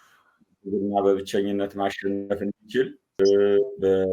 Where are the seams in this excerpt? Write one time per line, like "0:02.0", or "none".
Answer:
none